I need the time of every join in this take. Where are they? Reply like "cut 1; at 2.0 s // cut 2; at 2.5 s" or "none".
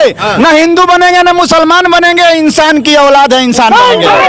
none